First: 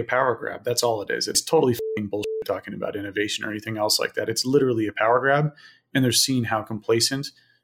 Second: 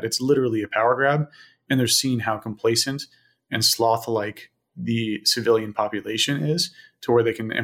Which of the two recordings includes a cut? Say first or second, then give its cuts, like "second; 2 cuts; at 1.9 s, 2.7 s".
first; 1 cut; at 1.4 s